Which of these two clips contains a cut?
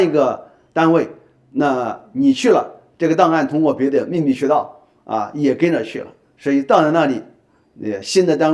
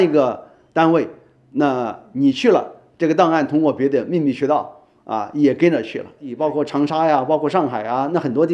second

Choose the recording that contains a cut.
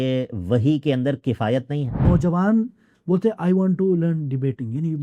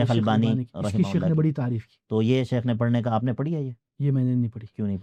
first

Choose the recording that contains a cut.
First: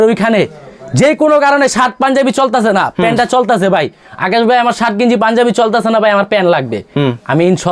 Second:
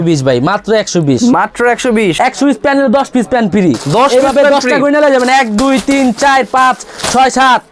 second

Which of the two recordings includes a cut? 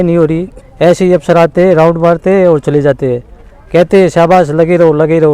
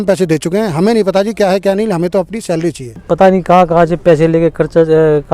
second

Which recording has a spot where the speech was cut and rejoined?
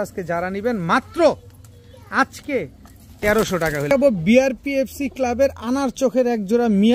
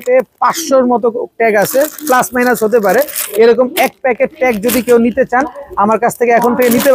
first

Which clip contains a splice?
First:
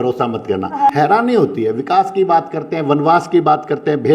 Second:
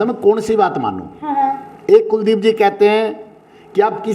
first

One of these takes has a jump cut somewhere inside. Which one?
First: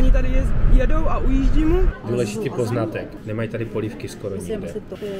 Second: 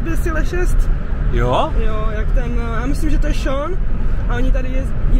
first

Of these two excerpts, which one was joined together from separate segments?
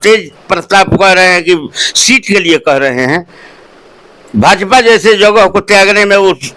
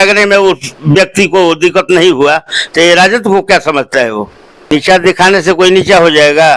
second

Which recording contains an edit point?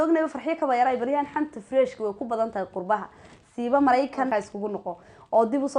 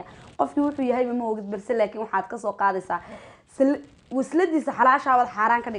first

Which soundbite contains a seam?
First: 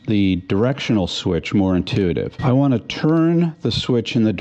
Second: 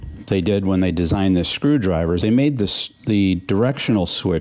first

